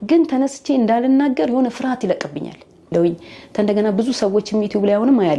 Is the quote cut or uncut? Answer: cut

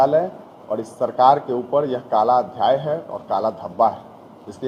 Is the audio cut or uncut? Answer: uncut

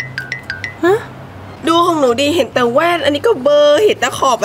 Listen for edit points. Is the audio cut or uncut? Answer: cut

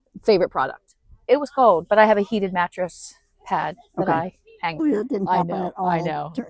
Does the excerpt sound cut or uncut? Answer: cut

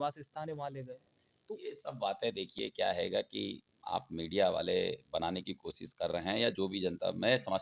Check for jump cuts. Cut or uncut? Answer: uncut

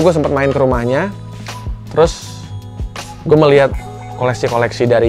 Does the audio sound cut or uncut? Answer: uncut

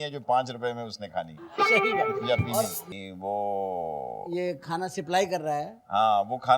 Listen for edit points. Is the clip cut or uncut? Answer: cut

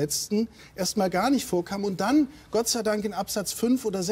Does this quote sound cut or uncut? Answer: uncut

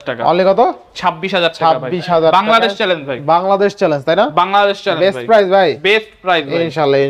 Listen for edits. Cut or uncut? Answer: uncut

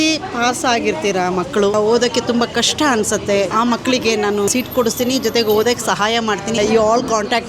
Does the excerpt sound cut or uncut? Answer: cut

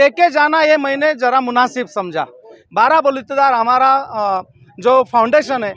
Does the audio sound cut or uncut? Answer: cut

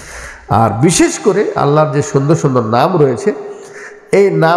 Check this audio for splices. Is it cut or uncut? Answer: uncut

